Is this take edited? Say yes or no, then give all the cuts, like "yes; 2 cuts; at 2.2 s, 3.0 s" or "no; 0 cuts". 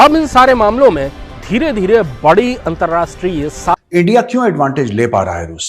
yes; 1 cut; at 3.7 s